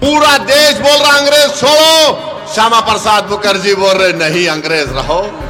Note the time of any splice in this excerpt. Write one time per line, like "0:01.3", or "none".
none